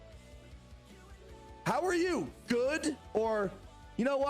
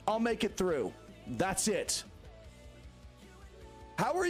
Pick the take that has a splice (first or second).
first